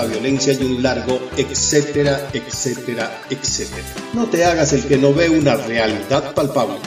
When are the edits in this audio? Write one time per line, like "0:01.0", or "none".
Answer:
none